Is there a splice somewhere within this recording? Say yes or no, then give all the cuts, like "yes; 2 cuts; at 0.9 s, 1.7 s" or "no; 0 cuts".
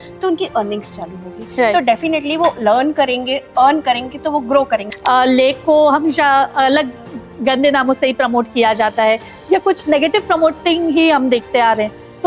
yes; 1 cut; at 4.8 s